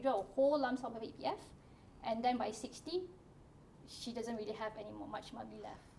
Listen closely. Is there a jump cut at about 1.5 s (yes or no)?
no